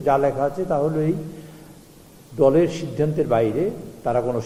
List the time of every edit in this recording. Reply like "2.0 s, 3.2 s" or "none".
none